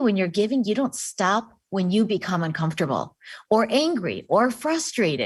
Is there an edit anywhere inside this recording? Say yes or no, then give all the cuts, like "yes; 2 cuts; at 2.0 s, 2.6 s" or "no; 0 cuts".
no; 0 cuts